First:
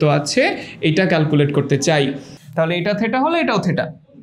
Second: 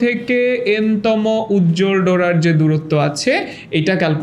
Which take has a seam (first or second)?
first